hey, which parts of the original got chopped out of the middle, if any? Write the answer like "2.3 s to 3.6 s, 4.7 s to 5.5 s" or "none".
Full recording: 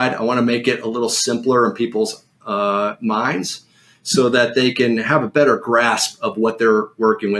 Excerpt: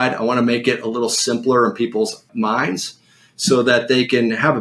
2.3 s to 3.0 s